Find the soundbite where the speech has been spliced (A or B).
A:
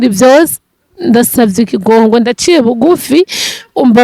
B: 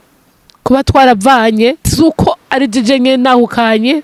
B